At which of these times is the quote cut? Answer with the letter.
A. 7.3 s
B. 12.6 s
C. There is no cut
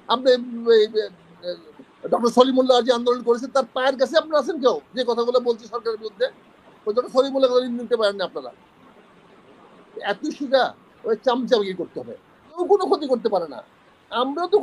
B